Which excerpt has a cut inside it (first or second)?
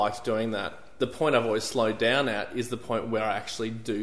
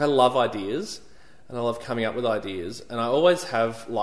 first